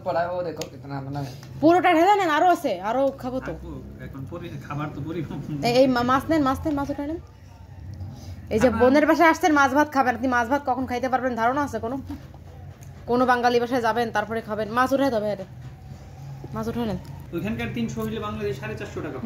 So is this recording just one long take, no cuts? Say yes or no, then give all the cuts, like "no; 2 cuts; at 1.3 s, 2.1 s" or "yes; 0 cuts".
no; 1 cut; at 17.1 s